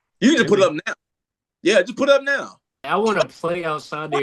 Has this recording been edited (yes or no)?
yes